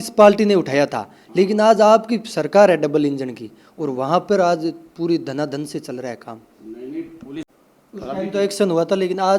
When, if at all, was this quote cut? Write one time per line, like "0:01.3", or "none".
0:07.4